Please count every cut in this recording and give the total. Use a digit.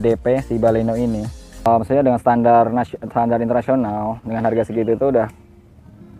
1